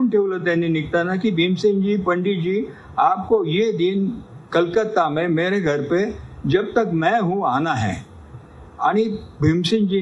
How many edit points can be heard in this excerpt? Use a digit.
0